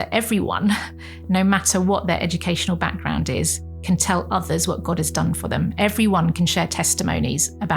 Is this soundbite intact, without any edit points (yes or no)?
no